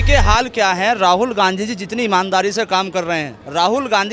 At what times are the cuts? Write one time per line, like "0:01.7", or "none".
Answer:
none